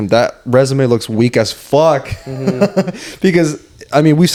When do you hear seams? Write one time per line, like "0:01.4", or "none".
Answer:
none